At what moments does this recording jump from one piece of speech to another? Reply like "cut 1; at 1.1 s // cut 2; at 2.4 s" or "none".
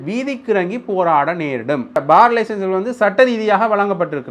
cut 1; at 2.0 s